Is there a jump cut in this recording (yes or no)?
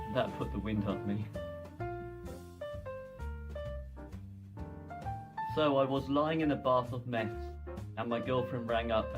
no